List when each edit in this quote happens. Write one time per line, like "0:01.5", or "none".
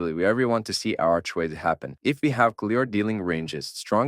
0:01.9